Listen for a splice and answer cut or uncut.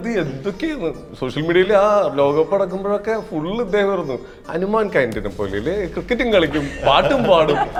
uncut